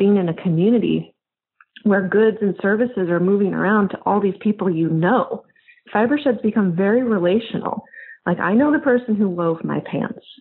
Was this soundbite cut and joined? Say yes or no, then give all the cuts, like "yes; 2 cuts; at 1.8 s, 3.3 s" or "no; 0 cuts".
yes; 1 cut; at 5.8 s